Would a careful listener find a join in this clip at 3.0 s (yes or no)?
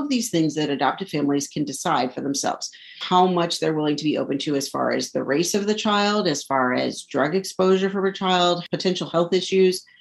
yes